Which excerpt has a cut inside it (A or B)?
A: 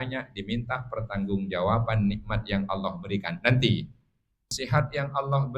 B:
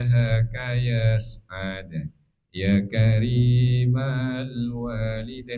A